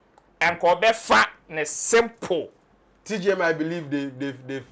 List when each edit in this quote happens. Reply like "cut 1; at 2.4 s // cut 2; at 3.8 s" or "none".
cut 1; at 2.6 s